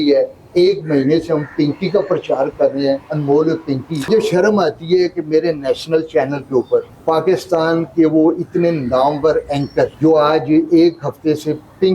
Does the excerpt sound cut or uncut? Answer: cut